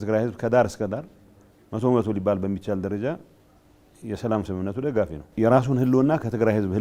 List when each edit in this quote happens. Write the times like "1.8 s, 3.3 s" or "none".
5.2 s